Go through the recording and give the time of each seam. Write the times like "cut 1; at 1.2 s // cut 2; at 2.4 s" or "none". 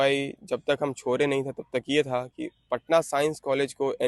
none